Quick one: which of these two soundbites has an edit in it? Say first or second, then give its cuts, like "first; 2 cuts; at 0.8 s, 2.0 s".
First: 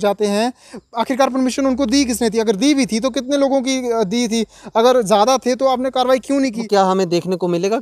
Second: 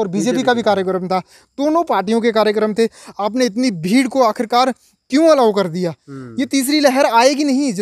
first; 1 cut; at 6.6 s